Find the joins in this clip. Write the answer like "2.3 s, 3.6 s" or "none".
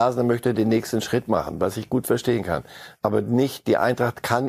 none